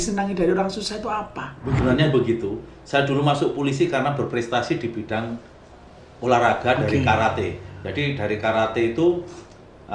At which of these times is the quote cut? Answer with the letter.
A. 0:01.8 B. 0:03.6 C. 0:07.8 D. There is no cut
A